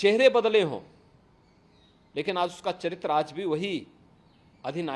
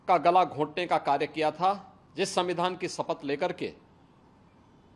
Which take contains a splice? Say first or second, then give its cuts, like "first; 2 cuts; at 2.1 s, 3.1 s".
second; 1 cut; at 2.0 s